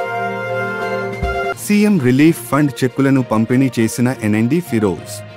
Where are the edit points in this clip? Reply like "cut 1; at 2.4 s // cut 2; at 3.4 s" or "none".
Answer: cut 1; at 1.5 s